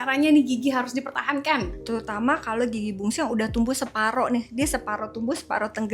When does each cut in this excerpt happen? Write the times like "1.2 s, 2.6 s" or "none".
1.7 s